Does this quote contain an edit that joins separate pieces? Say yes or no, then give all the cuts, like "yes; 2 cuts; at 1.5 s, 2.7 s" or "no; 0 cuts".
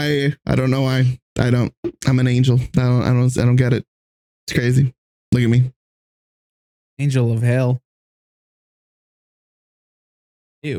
no; 0 cuts